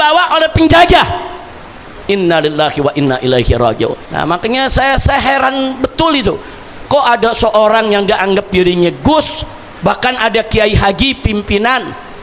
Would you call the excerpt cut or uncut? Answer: cut